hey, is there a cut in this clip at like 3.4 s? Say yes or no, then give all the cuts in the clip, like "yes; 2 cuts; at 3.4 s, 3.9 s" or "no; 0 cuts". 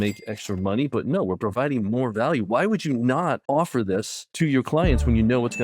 yes; 2 cuts; at 3.4 s, 4.2 s